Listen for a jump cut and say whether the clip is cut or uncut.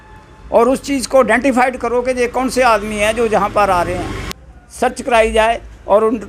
cut